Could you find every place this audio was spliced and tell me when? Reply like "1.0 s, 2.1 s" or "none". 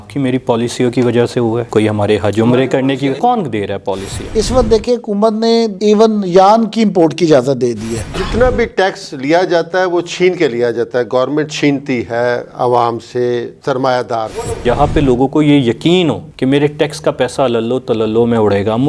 3.2 s, 4.3 s, 8.0 s, 14.6 s